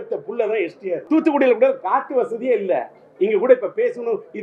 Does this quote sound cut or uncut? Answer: cut